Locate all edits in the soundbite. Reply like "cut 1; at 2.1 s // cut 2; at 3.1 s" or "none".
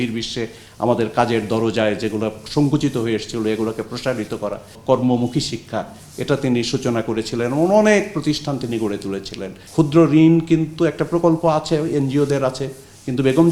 cut 1; at 4.7 s // cut 2; at 9.5 s